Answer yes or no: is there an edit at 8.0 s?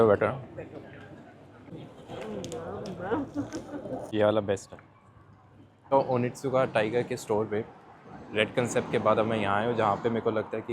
no